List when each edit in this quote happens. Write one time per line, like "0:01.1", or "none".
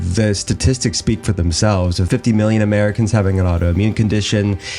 0:02.0